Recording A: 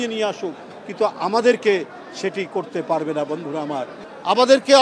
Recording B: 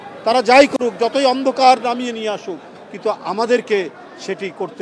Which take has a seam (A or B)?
A